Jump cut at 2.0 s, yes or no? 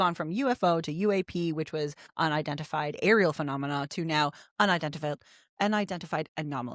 yes